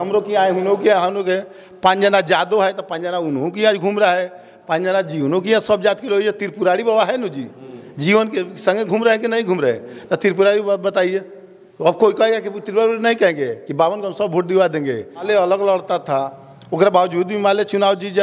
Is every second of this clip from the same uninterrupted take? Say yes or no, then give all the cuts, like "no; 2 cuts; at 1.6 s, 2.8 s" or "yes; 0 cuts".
no; 1 cut; at 15.1 s